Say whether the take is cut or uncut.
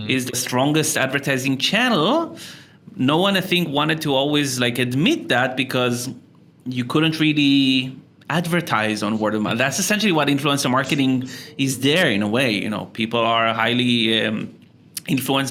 uncut